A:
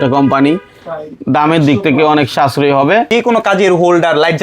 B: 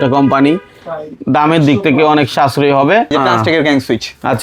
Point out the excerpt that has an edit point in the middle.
A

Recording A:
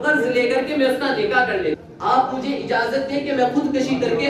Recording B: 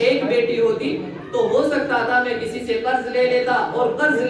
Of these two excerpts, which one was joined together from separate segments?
A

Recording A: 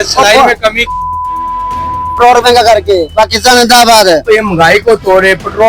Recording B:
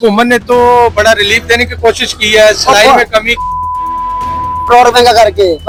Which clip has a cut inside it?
A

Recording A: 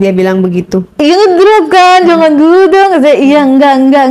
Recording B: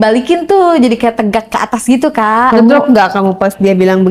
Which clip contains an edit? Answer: B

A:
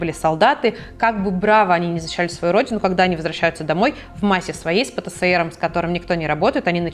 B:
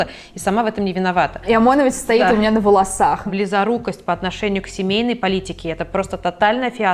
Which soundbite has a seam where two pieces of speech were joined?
B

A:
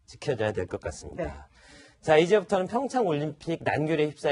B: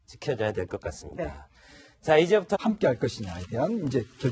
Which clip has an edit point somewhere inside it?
A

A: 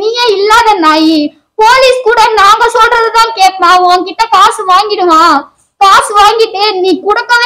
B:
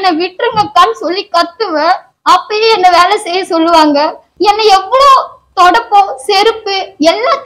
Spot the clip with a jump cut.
B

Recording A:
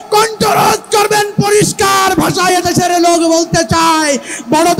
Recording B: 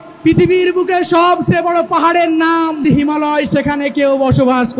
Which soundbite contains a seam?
B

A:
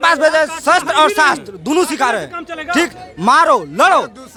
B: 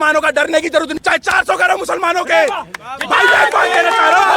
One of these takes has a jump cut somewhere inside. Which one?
B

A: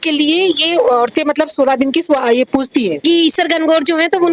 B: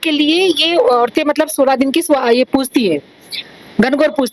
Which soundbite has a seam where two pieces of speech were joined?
A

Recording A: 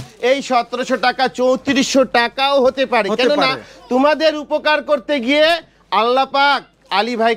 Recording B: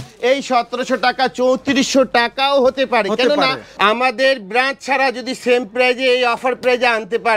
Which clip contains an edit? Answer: B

